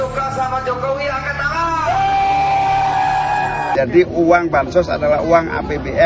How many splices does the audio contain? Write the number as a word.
one